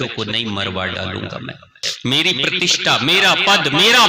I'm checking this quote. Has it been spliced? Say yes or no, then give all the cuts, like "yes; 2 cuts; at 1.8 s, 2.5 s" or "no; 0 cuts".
yes; 1 cut; at 1.8 s